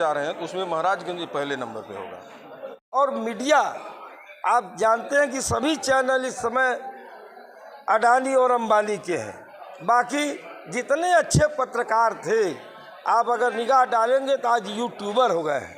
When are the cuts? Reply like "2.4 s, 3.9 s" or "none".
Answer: 2.8 s